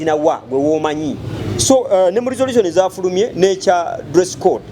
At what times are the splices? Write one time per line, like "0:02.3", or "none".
0:01.4